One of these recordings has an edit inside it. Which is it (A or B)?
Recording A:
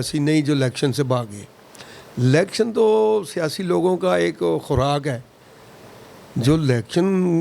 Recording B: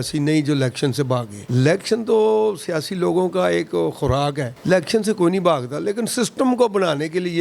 B